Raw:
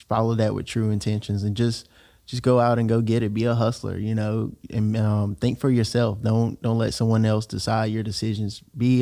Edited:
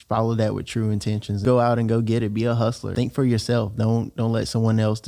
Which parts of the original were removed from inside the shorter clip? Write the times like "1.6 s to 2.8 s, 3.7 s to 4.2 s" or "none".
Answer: 1.4 s to 2.4 s, 3.9 s to 5.3 s